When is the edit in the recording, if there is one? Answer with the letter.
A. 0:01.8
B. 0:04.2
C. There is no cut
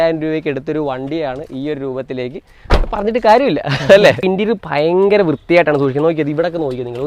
B